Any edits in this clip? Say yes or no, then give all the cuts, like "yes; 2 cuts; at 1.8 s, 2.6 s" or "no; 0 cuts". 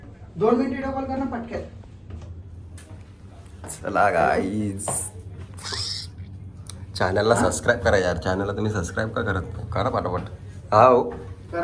no; 0 cuts